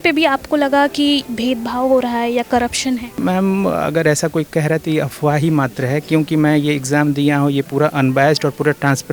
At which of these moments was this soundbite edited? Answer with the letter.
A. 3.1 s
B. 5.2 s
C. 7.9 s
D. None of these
A